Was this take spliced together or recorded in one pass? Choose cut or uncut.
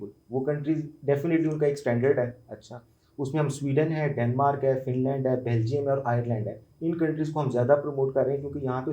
uncut